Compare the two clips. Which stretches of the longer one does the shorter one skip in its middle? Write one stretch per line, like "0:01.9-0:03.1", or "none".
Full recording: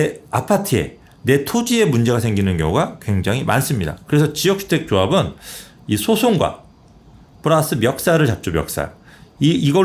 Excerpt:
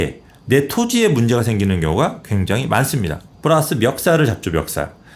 0:03.9-0:07.2